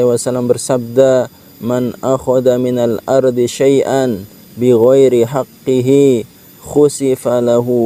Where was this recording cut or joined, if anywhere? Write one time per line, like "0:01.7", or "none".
none